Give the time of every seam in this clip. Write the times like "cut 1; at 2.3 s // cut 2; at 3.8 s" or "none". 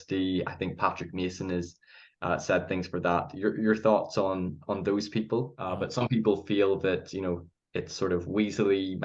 cut 1; at 5.6 s